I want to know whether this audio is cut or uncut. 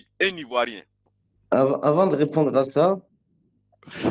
uncut